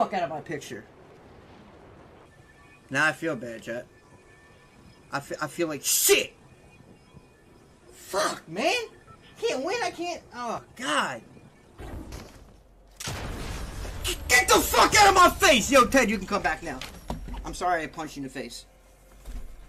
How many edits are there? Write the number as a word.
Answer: two